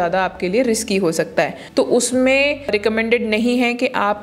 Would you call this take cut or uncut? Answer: cut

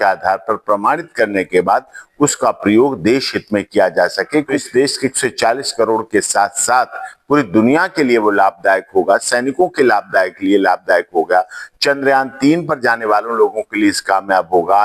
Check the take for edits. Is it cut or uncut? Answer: cut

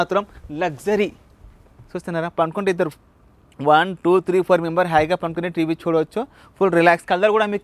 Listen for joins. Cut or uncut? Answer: uncut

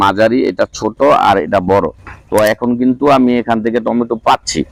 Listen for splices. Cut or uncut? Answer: uncut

